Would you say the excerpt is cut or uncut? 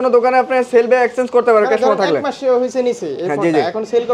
uncut